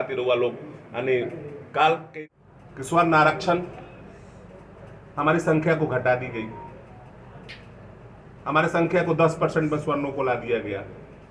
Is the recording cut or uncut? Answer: cut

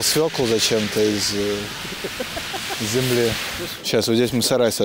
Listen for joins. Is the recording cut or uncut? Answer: cut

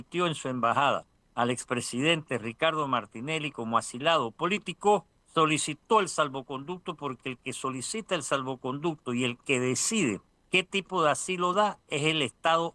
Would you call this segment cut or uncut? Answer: cut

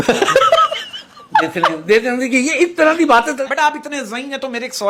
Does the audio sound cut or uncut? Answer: uncut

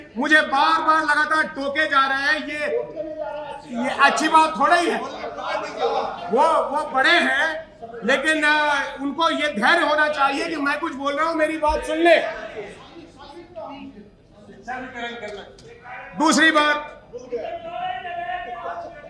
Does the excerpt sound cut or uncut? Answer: uncut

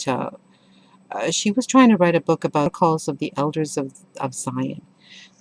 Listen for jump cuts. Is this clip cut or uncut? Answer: uncut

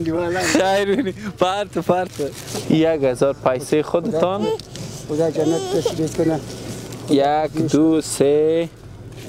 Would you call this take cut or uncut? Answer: cut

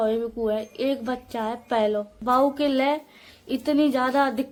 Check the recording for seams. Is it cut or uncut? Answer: uncut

